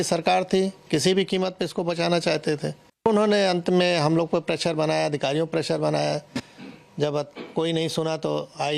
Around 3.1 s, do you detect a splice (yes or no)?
yes